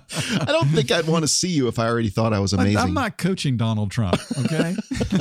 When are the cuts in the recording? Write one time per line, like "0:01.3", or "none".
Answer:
none

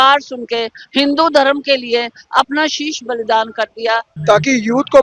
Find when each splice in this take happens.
0:04.1

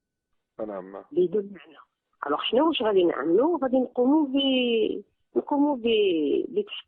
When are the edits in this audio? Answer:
0:01.5

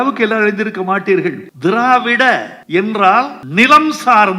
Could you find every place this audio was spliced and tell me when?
0:01.5
0:02.5
0:03.4

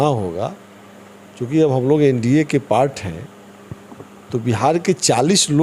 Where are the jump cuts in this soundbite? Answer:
none

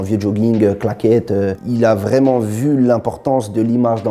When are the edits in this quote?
0:01.6

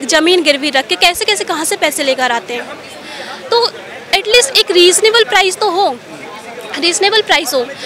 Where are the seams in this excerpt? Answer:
none

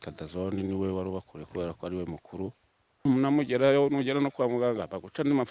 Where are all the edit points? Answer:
0:03.1

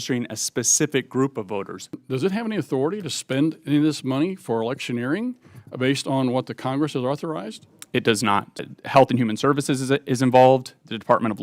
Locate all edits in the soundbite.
0:02.0
0:08.7

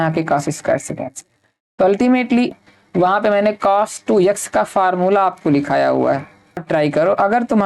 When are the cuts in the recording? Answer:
0:02.6
0:06.6

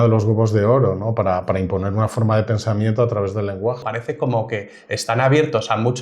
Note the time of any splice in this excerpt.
0:03.9

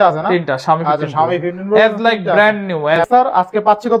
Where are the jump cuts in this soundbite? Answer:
0:03.0

